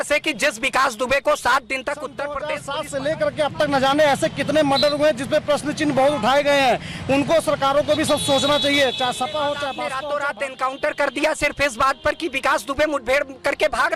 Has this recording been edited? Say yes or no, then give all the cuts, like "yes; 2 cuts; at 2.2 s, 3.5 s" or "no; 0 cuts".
yes; 2 cuts; at 2.5 s, 9.8 s